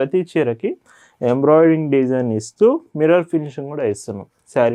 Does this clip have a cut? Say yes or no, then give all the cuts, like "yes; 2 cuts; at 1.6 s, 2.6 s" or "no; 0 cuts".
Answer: no; 0 cuts